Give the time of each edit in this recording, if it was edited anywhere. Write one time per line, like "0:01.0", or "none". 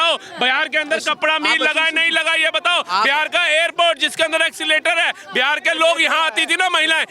none